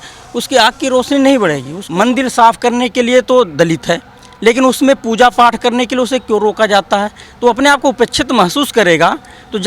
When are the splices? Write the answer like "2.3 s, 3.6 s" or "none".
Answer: 1.8 s